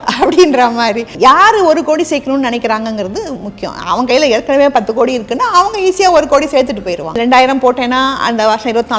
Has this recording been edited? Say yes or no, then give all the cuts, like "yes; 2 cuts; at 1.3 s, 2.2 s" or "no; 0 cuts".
yes; 2 cuts; at 1.1 s, 7.2 s